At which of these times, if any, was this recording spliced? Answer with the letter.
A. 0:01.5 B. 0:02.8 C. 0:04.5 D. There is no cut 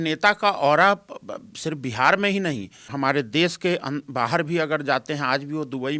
B